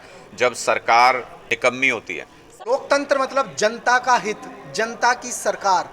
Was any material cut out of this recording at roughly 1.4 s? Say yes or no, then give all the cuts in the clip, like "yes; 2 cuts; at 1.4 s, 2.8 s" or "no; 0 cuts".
yes; 2 cuts; at 1.4 s, 2.5 s